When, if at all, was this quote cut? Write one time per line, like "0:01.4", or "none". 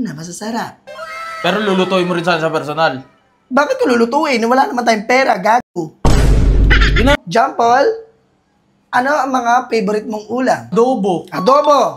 0:07.2
0:10.7